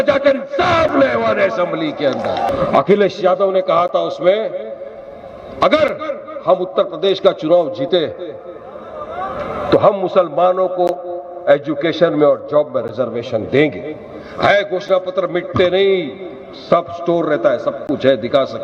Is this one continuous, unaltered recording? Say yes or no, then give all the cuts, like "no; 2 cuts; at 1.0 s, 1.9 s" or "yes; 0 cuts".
no; 1 cut; at 2.5 s